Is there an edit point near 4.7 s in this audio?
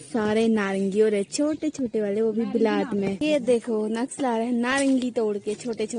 no; 1 cut; at 3.2 s

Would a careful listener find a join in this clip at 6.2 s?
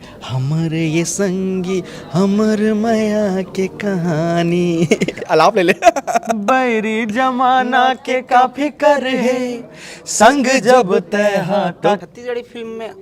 no; 1 cut; at 12.0 s

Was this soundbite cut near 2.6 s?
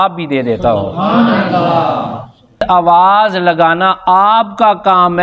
yes; 1 cut; at 2.6 s

